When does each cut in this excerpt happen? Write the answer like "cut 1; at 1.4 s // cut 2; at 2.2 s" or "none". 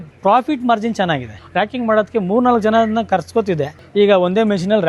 cut 1; at 1.4 s // cut 2; at 3.8 s